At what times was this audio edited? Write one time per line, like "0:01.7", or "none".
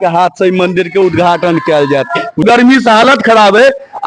0:02.4